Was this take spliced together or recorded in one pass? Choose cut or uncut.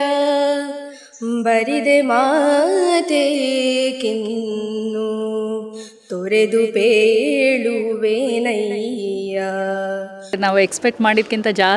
cut